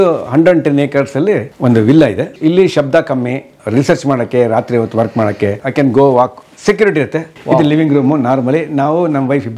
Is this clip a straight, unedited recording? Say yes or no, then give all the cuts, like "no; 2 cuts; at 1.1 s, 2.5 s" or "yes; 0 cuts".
no; 4 cuts; at 1.5 s, 2.3 s, 5.6 s, 7.3 s